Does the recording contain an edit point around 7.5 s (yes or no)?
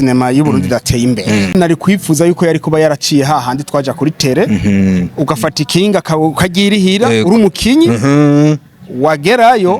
no